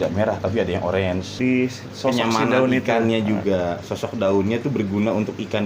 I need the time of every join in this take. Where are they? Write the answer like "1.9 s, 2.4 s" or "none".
1.3 s